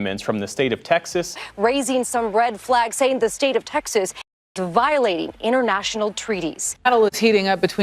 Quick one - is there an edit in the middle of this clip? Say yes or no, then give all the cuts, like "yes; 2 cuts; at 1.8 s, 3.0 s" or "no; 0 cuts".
yes; 2 cuts; at 1.3 s, 6.8 s